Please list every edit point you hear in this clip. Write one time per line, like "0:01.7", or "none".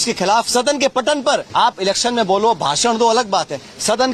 0:01.3